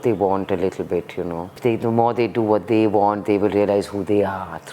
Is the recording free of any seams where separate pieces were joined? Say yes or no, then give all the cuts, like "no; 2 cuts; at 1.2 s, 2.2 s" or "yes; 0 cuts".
no; 1 cut; at 1.6 s